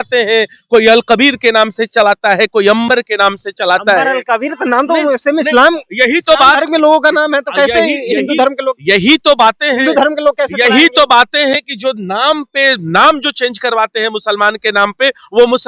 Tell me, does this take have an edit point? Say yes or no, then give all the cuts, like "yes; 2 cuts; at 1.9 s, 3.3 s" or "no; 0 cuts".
no; 0 cuts